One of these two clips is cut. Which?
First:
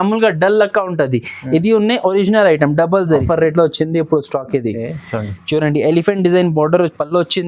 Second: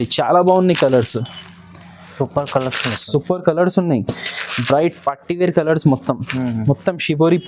first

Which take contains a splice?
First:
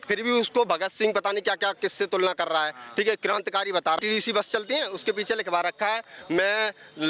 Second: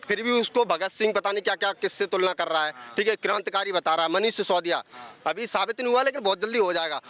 first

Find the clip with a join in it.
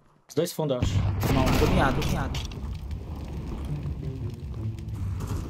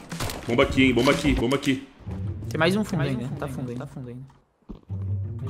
second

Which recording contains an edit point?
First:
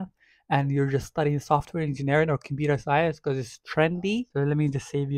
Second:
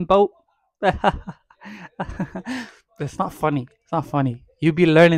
first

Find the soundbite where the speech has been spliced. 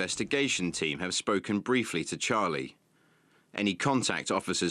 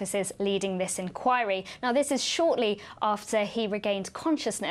second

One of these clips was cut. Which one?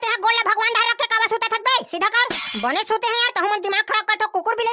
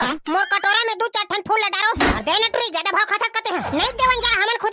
second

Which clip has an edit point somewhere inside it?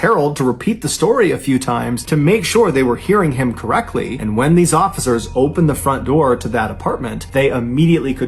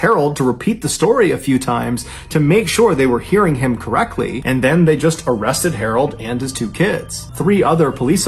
first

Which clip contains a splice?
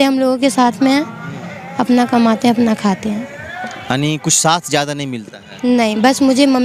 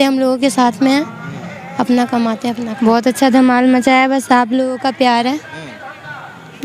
second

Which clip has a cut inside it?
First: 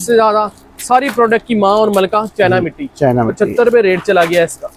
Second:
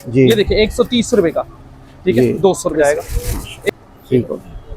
second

